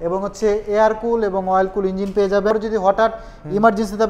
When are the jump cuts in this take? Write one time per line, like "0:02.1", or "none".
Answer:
0:02.5